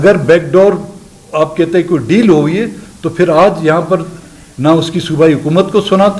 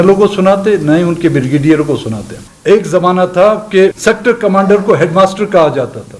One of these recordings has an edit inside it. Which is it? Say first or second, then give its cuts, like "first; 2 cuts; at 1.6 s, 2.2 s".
second; 2 cuts; at 2.5 s, 4.0 s